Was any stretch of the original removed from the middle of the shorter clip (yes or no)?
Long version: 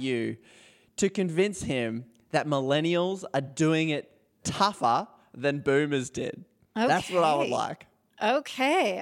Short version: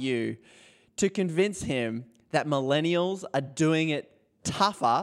no